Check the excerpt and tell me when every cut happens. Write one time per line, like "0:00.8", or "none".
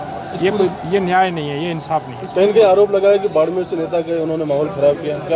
none

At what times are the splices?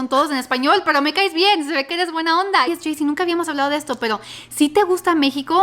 0:02.7

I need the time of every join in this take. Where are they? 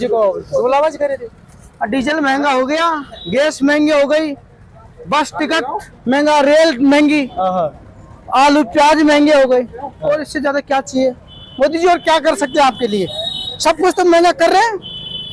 none

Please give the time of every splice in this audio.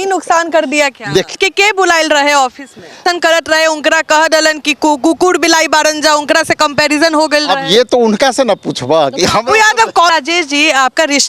0:01.4
0:03.0
0:10.1

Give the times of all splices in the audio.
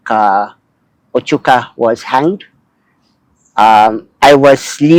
none

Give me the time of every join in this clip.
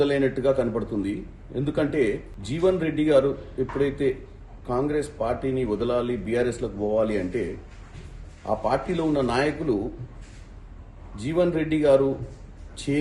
0:02.3

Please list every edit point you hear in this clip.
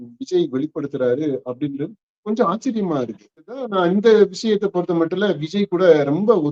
0:03.6

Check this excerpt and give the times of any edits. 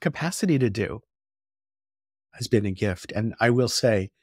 0:02.2

